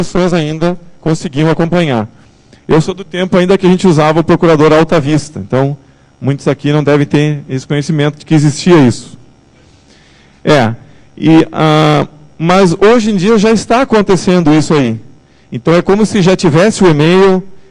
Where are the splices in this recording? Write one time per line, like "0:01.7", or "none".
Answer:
0:16.1